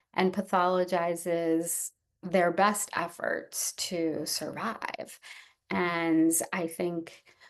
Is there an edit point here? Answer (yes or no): no